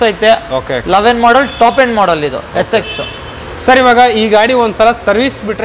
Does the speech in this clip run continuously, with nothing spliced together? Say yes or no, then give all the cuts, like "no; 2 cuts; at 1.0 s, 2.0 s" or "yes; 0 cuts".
yes; 0 cuts